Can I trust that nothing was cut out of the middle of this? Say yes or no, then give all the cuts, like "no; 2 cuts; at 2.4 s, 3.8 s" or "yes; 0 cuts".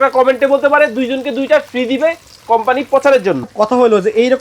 no; 1 cut; at 3.4 s